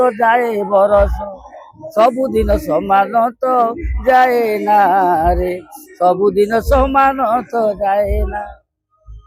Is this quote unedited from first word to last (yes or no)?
yes